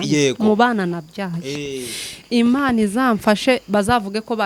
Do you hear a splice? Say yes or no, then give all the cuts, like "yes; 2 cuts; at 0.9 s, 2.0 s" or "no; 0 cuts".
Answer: no; 0 cuts